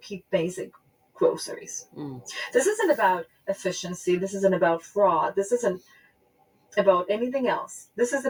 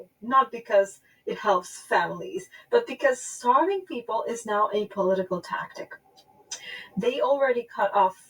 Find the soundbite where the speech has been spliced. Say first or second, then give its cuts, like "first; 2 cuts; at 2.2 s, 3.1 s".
second; 1 cut; at 6.2 s